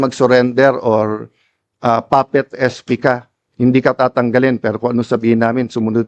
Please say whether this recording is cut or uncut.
uncut